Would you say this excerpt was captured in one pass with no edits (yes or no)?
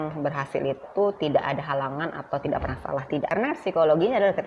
no